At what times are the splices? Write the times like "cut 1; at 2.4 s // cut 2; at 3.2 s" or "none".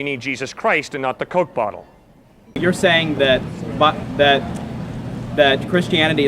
cut 1; at 2.6 s